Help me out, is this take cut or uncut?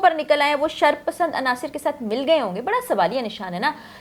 uncut